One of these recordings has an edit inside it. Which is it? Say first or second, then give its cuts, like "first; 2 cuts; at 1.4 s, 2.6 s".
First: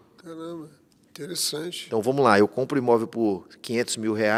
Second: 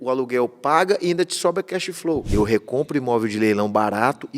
second; 1 cut; at 2.3 s